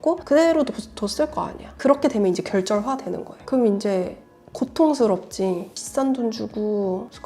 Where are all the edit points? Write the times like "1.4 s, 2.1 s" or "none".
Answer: 1.6 s, 5.7 s